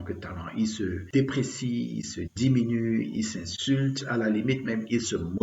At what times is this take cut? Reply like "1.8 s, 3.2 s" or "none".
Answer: 1.0 s

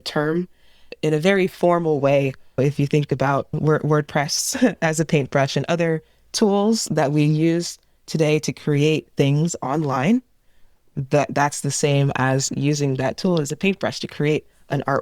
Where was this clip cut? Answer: 0.9 s, 2.6 s

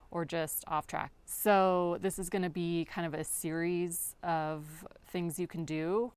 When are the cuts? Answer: 1.1 s

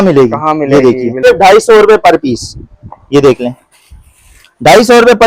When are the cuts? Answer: 1.2 s

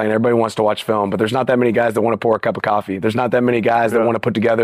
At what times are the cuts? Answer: none

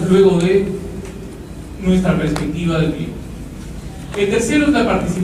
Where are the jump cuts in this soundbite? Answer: 1.4 s

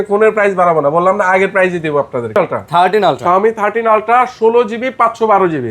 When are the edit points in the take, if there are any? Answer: 2.3 s

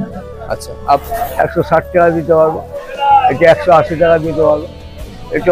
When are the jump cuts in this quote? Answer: 1.0 s

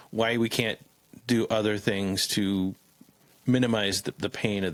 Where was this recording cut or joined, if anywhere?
none

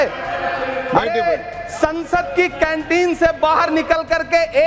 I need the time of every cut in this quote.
none

